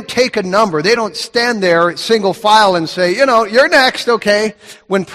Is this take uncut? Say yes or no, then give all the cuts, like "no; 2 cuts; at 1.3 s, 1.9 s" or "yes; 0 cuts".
no; 1 cut; at 1.0 s